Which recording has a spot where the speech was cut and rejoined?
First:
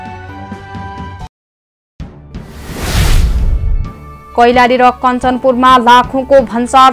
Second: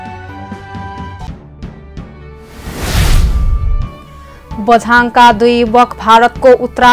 second; 1 cut; at 1.0 s

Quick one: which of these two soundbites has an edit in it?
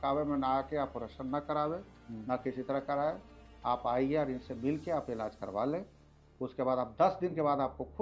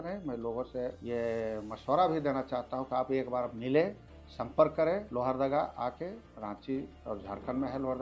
second; 4 cuts; at 1.0 s, 5.1 s, 6.3 s, 6.9 s

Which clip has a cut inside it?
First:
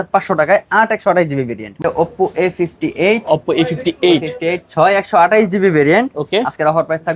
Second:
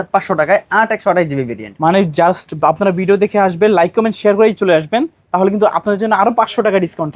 first; 1 cut; at 1.8 s

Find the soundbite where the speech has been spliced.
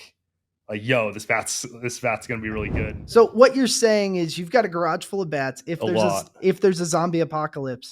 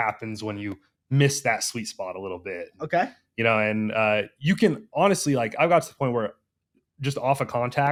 first; 1 cut; at 2.9 s

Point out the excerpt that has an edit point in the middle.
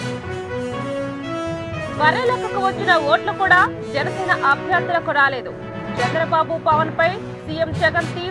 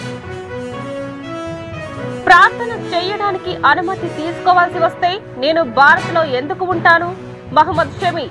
second; 1 cut; at 1.6 s

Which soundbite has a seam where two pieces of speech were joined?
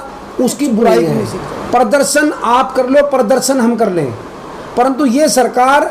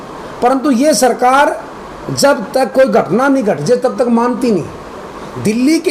first; 1 cut; at 1.0 s

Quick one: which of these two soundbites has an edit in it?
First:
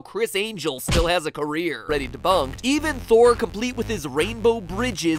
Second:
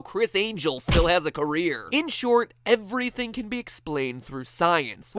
second; 1 cut; at 1.9 s

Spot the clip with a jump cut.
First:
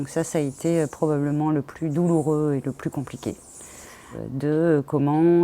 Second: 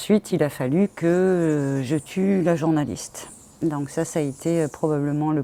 first; 1 cut; at 4.1 s

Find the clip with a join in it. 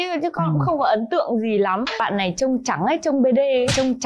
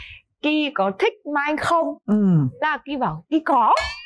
first; 1 cut; at 2.0 s

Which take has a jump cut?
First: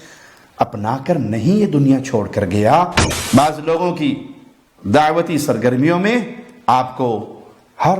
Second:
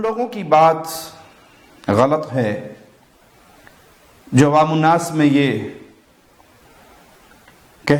first; 1 cut; at 3.1 s

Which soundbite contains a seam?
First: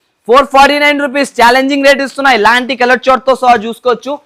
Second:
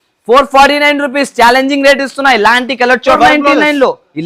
second; 1 cut; at 3.2 s

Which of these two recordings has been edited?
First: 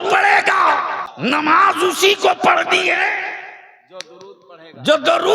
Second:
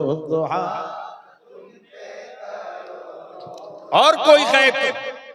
first; 1 cut; at 1.0 s

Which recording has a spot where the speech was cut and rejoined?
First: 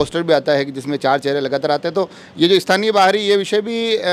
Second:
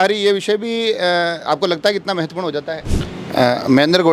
second; 1 cut; at 2.9 s

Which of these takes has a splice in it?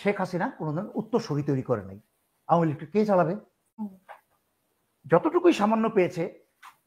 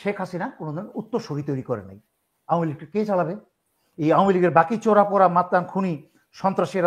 first; 1 cut; at 3.9 s

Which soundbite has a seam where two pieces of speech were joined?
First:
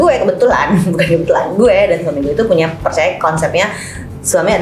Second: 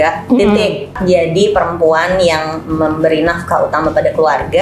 second; 1 cut; at 0.9 s

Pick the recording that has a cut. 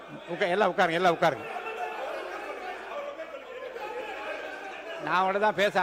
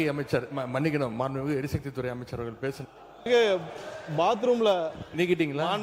second; 1 cut; at 3.3 s

